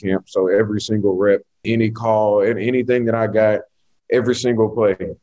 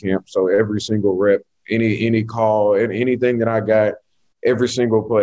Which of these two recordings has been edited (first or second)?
first